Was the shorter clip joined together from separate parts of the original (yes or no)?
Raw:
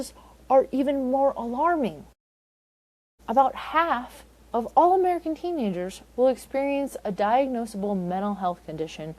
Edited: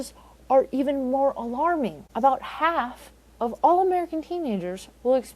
yes